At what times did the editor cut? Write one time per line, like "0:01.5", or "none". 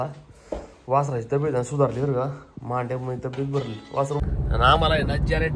0:04.2